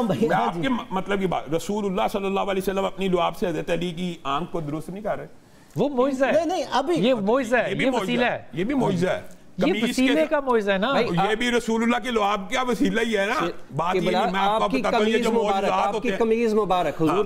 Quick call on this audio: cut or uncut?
uncut